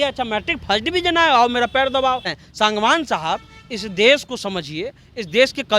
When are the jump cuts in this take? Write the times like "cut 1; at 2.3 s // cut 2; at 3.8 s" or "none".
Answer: cut 1; at 2.4 s